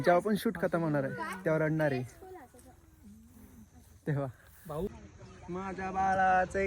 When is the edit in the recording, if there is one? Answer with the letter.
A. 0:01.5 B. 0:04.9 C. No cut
B